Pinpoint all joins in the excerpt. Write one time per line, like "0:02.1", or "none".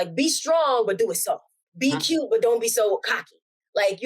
0:01.6